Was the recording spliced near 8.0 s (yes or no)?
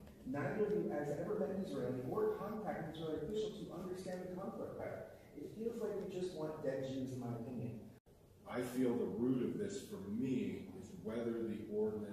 yes